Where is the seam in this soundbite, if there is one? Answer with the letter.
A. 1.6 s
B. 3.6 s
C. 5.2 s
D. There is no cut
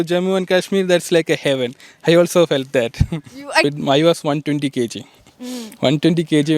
B